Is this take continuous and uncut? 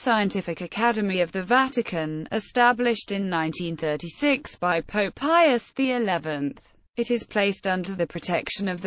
yes; 0 cuts

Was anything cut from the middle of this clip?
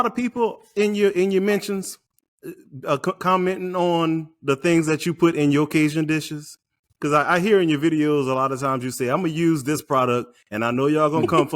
no; 0 cuts

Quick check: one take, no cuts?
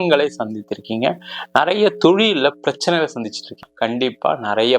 no; 1 cut; at 3.6 s

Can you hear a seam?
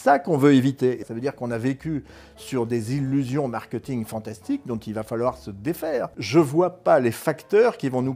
yes; 2 cuts; at 1.0 s, 6.2 s

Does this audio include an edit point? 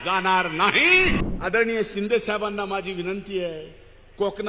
yes; 1 cut; at 1.3 s

